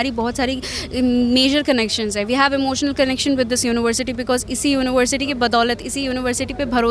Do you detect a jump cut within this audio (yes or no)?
no